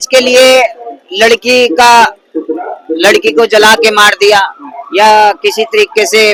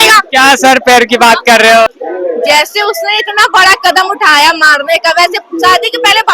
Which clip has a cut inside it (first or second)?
second